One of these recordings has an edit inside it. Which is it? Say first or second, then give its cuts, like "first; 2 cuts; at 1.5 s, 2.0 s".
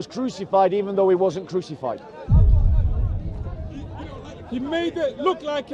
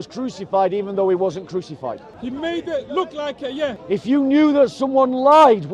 second; 2 cuts; at 2.1 s, 3.8 s